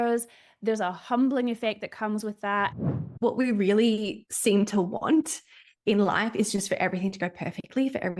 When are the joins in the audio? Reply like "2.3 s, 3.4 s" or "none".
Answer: 2.7 s